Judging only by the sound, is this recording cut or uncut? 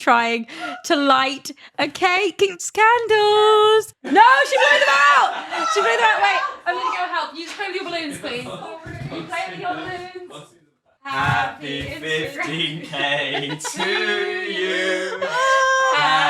cut